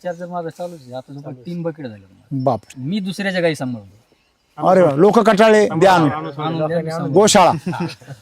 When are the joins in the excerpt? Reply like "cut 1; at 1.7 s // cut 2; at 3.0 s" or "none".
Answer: cut 1; at 2.8 s